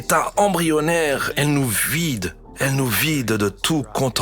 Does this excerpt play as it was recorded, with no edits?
no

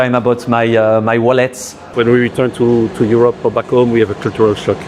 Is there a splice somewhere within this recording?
yes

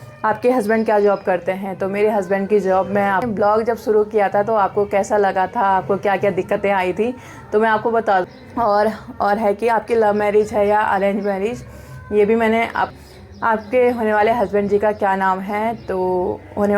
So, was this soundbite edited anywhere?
yes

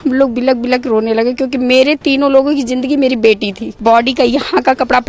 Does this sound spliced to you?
yes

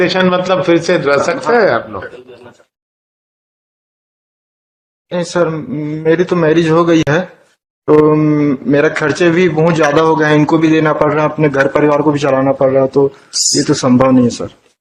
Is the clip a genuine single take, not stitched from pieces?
yes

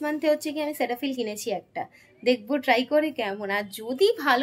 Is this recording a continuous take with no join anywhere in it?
yes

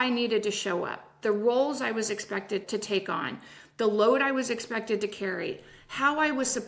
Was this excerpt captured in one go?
no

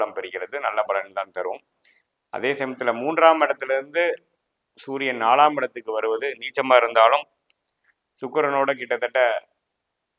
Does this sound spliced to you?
no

